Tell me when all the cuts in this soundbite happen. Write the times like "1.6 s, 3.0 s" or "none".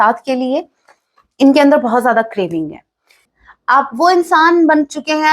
3.2 s